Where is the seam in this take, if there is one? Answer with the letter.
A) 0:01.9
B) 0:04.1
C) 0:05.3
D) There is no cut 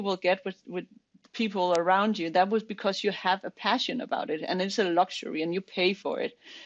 D